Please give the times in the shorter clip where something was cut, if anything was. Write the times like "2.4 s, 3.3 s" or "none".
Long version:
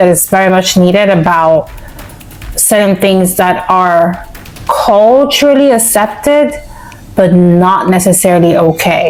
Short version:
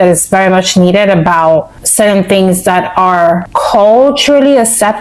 1.8 s, 3.5 s